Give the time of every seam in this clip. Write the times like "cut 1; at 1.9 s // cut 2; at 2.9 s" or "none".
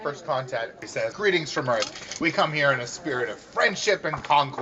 cut 1; at 1.1 s